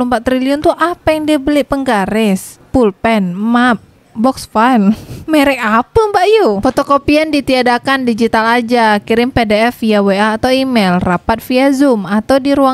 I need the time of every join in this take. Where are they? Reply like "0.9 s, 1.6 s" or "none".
6.6 s

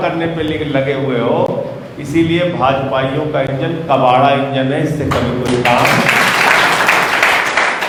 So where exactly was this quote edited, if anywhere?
none

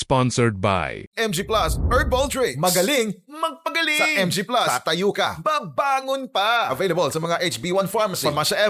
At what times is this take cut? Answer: 1.0 s

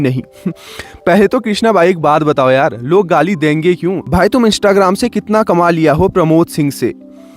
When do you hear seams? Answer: 4.0 s

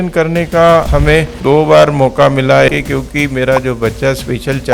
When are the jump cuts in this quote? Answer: 0.9 s, 2.7 s

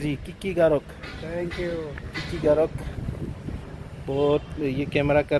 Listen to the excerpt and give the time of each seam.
none

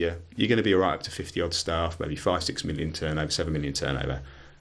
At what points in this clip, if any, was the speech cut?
none

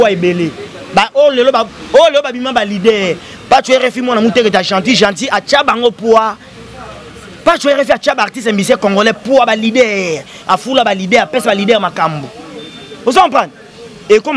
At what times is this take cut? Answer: none

